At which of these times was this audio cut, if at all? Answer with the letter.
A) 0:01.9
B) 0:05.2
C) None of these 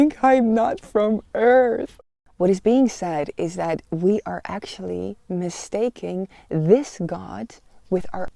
A